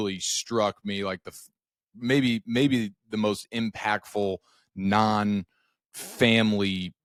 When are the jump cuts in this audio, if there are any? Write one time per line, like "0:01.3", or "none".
none